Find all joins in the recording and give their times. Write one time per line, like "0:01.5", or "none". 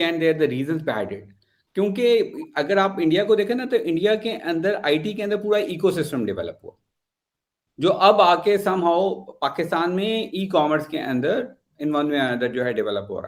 none